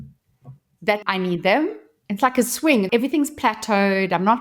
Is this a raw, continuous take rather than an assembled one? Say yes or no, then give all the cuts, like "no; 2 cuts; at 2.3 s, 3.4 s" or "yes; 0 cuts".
no; 3 cuts; at 1.0 s, 1.9 s, 2.9 s